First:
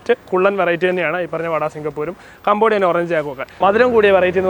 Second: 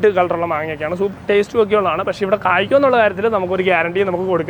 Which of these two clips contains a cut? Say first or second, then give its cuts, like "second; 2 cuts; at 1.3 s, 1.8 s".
first; 1 cut; at 3.5 s